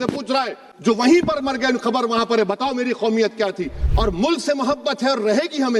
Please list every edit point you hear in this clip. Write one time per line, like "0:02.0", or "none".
0:03.8